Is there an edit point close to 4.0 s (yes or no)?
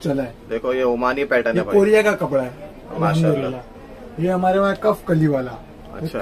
yes